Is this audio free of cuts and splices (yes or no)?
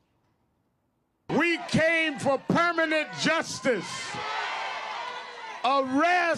yes